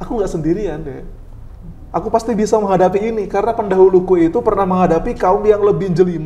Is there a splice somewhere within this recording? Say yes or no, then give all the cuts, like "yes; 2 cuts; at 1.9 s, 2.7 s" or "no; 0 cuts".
no; 0 cuts